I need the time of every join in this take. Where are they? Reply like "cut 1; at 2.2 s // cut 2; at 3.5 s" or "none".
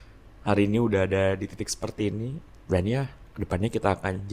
cut 1; at 2.5 s